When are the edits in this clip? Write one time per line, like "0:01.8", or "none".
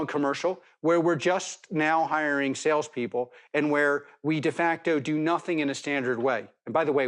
none